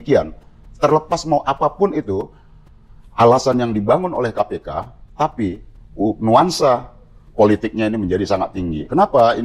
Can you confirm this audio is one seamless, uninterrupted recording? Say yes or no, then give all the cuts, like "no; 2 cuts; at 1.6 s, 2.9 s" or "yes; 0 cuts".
yes; 0 cuts